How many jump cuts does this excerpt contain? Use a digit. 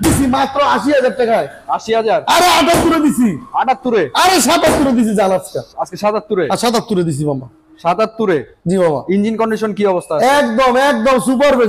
0